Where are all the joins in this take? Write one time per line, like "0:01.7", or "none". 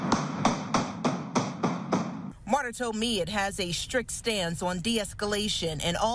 none